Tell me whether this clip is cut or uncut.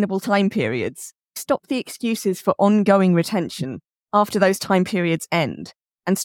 uncut